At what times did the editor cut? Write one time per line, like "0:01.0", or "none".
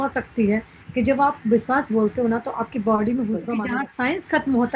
0:03.7